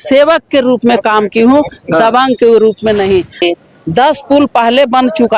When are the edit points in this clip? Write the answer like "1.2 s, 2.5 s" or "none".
3.4 s